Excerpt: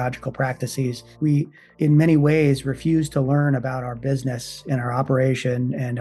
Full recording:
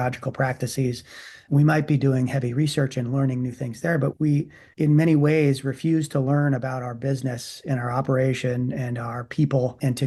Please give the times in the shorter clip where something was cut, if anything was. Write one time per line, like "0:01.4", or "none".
0:01.2

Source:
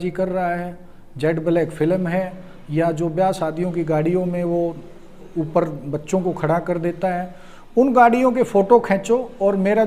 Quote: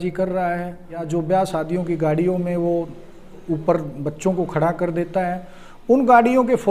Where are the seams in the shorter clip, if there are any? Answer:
0:01.1

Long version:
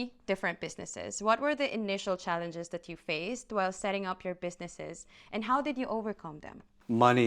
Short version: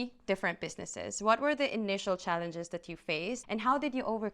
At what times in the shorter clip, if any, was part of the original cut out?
0:03.4

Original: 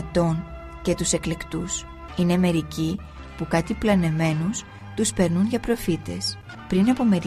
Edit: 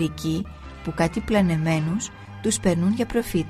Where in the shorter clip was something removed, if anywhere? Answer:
none

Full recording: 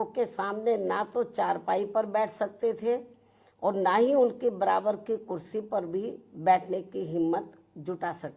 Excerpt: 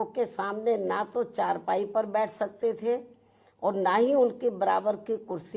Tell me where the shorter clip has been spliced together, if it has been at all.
none

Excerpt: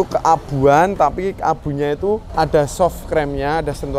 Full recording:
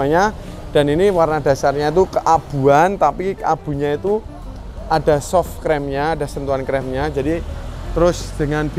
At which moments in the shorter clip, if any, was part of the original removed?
0:02.3

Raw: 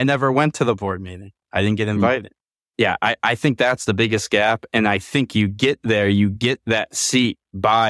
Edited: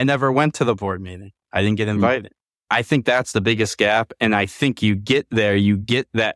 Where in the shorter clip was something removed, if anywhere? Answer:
0:02.6

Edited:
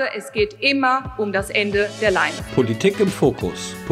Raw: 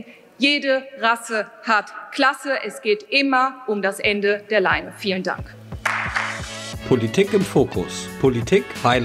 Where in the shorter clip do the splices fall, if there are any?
0:02.4

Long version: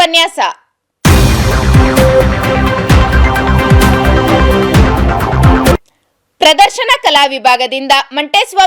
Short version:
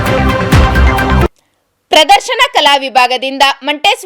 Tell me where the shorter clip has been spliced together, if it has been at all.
0:01.2

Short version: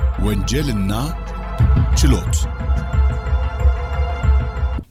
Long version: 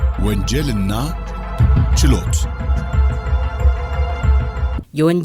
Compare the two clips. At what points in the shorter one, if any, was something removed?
none

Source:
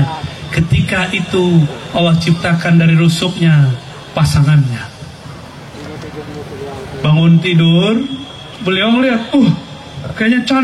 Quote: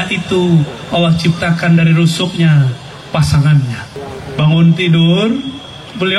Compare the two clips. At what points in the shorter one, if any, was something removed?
0:03.9

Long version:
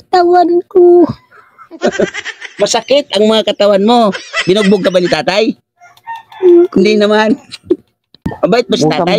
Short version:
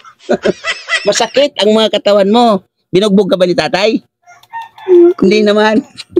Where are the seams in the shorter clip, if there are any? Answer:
none

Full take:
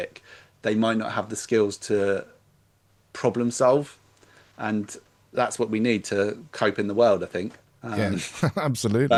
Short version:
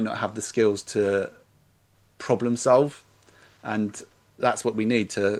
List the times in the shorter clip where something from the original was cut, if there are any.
none

